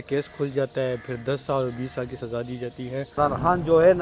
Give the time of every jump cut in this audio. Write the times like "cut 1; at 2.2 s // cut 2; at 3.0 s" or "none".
cut 1; at 3.1 s